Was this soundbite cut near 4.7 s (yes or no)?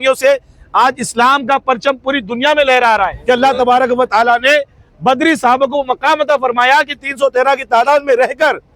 no